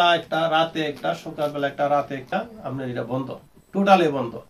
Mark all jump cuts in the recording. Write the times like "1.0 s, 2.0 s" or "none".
2.3 s

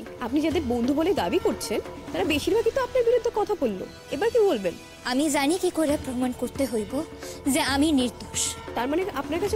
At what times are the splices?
4.9 s, 8.7 s

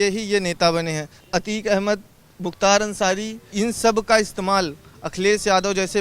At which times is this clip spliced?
1.2 s, 3.4 s

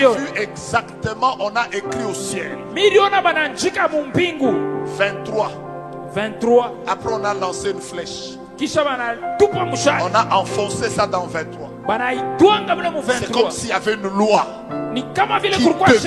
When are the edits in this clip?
none

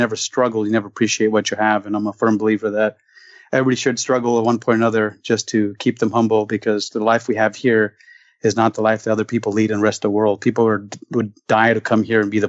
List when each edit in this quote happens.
none

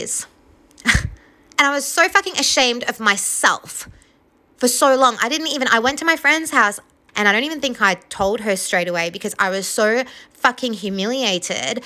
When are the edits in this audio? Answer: 7.0 s

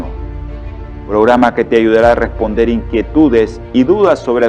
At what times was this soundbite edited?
none

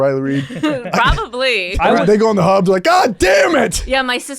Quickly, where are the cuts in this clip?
1.7 s

